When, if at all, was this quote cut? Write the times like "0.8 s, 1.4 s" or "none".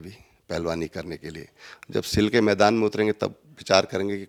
none

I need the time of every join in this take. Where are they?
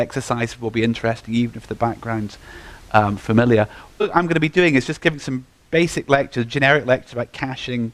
none

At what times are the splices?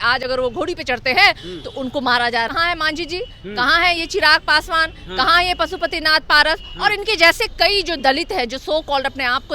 2.5 s

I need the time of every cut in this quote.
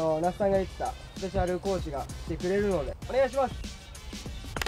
3.0 s

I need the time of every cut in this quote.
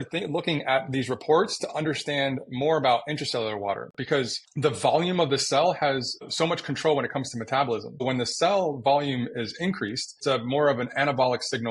4.4 s, 6.2 s, 8.0 s, 10.1 s

